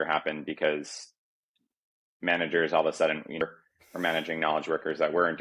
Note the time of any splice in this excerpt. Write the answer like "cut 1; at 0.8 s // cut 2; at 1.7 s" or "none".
cut 1; at 3.4 s